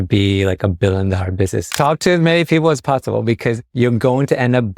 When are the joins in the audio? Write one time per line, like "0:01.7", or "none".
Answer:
0:01.7
0:03.6